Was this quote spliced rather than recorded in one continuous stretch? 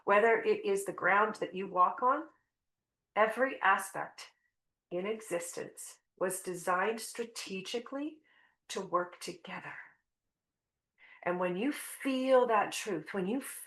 no; 0 cuts

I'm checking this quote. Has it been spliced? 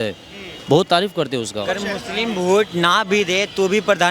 yes; 1 cut; at 1.6 s

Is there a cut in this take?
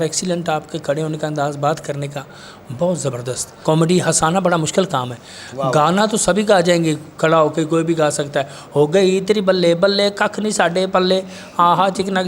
yes; 1 cut; at 3.5 s

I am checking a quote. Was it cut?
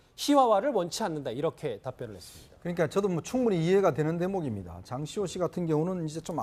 no; 0 cuts

